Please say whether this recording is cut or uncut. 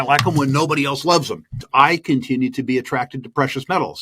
cut